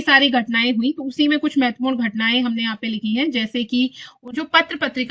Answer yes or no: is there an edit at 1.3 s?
no